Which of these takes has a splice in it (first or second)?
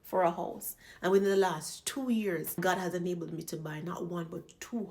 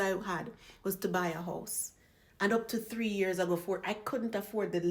first